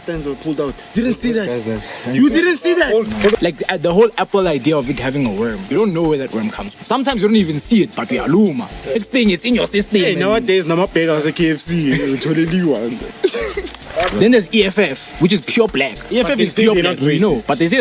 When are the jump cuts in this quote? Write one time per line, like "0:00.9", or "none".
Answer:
0:00.9
0:03.4
0:05.6
0:09.0
0:14.1
0:16.1

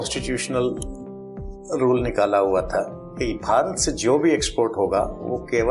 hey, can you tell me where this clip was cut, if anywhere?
none

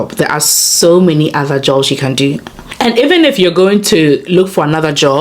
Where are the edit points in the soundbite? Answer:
0:02.6

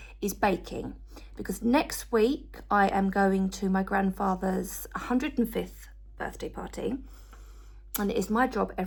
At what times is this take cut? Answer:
none

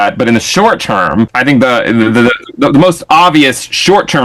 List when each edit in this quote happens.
0:01.3

